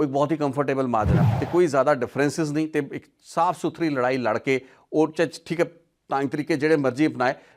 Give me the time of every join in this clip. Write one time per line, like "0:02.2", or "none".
0:01.2